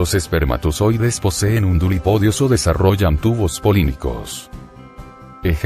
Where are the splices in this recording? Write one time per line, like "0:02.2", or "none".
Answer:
0:02.3